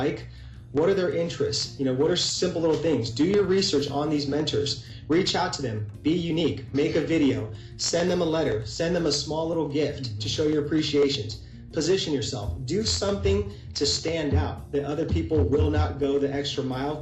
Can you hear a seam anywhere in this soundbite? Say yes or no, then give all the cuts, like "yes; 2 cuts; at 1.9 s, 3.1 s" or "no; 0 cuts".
no; 0 cuts